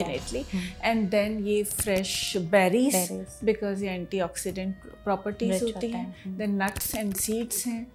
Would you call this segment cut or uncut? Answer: uncut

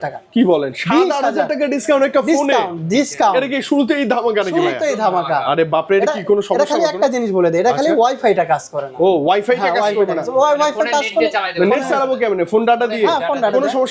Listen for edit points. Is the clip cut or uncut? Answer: uncut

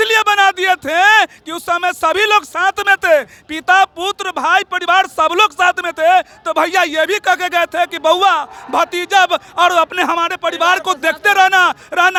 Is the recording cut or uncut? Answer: uncut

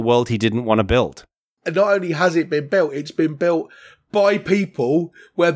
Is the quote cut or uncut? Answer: cut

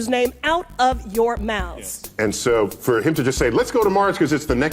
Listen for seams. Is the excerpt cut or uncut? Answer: cut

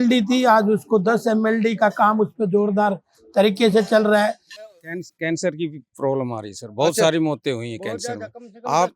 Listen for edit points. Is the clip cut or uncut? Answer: cut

